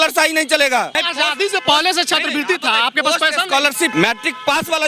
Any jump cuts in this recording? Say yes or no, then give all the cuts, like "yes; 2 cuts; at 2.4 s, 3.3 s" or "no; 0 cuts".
yes; 2 cuts; at 1.0 s, 3.9 s